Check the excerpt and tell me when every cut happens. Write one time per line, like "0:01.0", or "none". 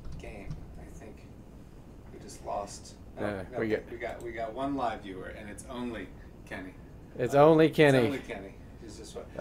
none